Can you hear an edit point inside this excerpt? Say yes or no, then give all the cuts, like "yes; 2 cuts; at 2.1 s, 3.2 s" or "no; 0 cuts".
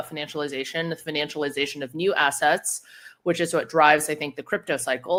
no; 0 cuts